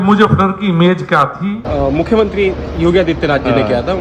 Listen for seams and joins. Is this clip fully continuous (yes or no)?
no